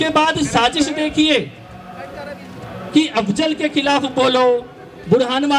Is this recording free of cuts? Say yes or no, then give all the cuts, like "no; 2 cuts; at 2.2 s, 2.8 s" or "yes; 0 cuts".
yes; 0 cuts